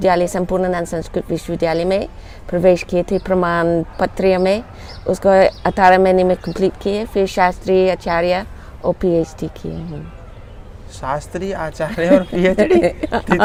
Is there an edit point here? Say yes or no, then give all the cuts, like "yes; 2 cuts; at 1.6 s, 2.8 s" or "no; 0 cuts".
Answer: no; 0 cuts